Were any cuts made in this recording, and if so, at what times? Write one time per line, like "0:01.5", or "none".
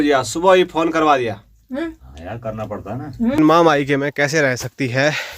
0:03.4